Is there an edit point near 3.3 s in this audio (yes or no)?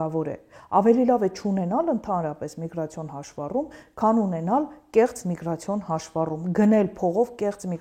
no